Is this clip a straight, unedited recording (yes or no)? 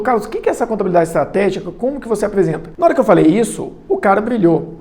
no